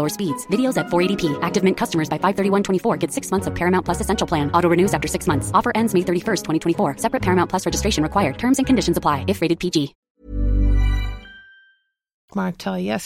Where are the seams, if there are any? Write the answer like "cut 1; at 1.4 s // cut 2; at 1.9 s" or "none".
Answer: none